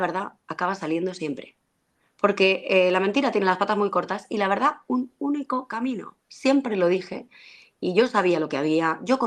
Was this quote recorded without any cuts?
yes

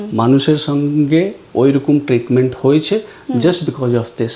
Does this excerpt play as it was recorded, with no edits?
yes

